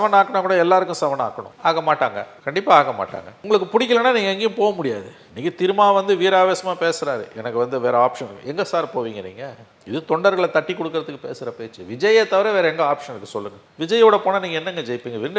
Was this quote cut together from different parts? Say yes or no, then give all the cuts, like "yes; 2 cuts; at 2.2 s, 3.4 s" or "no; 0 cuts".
no; 0 cuts